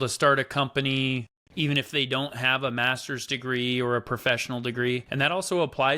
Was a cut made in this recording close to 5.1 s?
yes; 1 cut; at 5.1 s

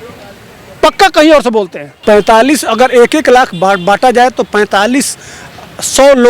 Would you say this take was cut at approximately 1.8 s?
yes; 1 cut; at 1.8 s

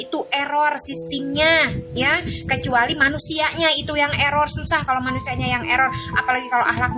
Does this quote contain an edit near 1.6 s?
no; 0 cuts

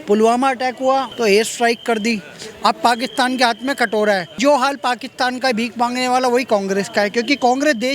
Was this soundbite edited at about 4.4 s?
yes; 2 cuts; at 1.1 s, 4.4 s

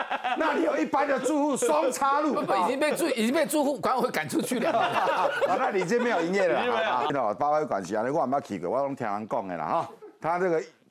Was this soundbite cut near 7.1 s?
yes; 1 cut; at 7.1 s

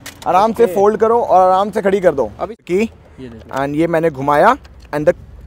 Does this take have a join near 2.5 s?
yes; 1 cut; at 2.5 s

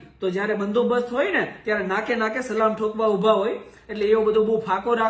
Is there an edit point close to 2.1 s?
no; 0 cuts

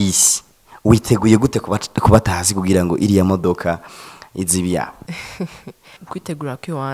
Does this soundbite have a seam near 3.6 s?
no; 2 cuts; at 5.0 s, 6.0 s

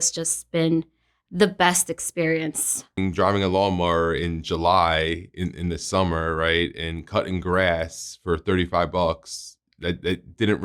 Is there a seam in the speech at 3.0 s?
yes; 1 cut; at 3.0 s

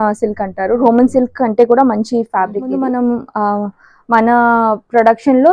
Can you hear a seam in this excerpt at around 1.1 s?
no; 1 cut; at 2.8 s

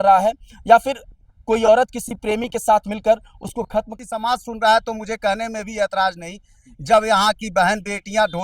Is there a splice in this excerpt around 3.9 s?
yes; 1 cut; at 3.9 s

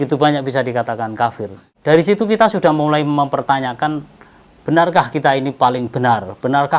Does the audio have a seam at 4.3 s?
no; 1 cut; at 1.6 s

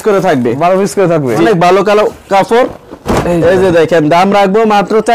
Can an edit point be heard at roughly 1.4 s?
yes; 1 cut; at 1.4 s

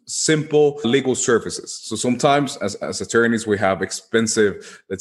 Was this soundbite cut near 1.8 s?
no; 0 cuts

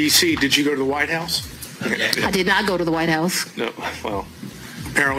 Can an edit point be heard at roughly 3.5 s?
no; 0 cuts

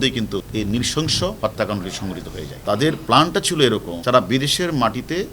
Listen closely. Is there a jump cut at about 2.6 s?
no; 1 cut; at 1.4 s

